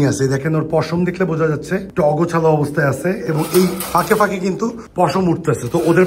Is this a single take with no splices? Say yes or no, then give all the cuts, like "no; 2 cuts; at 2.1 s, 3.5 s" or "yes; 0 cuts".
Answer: yes; 0 cuts